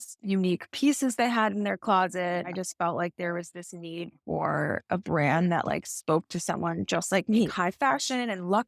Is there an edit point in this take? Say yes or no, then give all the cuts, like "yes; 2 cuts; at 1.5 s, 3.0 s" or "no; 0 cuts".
yes; 3 cuts; at 2.6 s, 4.8 s, 7.5 s